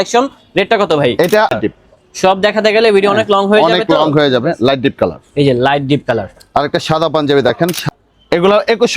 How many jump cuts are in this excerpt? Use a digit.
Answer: 2